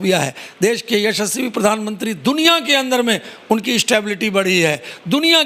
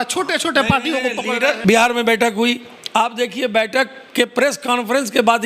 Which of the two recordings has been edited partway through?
second; 1 cut; at 1.6 s

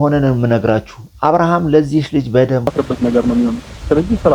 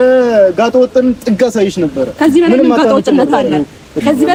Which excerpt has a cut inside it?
first; 1 cut; at 2.7 s

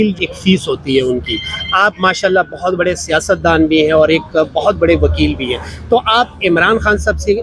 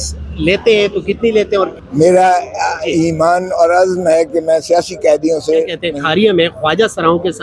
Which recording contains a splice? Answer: second; 2 cuts; at 1.8 s, 5.8 s

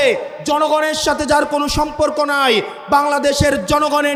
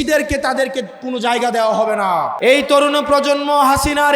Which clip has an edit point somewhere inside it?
second; 1 cut; at 2.3 s

